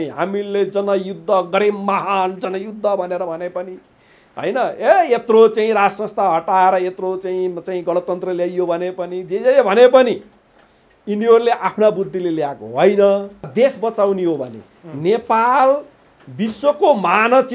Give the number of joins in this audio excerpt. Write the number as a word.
one